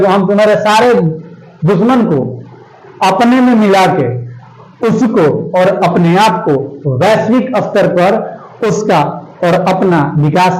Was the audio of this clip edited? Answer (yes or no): no